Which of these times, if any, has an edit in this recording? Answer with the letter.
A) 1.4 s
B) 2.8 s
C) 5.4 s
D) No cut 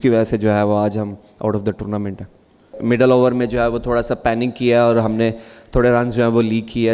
B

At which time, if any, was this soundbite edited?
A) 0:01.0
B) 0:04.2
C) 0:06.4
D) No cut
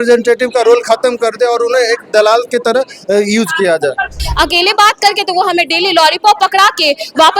B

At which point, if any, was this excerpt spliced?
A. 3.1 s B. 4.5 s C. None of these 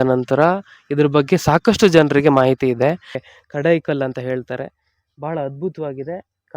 A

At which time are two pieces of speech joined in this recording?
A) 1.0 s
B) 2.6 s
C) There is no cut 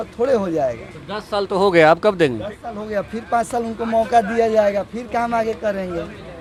C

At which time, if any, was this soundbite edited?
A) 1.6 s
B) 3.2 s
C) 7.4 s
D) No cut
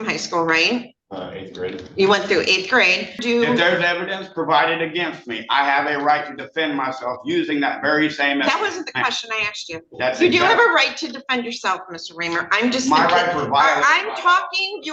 B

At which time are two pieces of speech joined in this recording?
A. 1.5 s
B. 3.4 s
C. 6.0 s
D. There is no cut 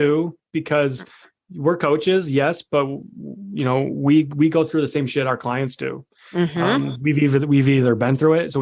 D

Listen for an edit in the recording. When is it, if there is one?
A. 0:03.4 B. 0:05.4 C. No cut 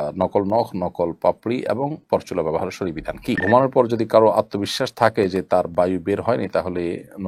A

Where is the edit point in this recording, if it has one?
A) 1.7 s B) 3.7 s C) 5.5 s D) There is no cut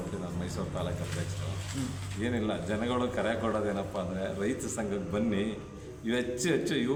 D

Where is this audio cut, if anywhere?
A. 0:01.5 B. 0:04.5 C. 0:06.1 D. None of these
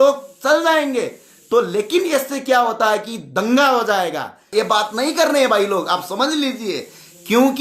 B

